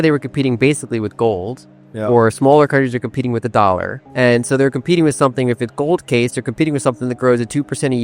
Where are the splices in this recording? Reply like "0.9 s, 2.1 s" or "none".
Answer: 4.0 s